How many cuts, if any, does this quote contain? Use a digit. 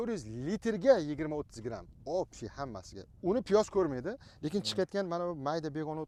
0